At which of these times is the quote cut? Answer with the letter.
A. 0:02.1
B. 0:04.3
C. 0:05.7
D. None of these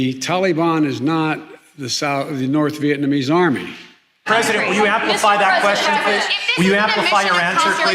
B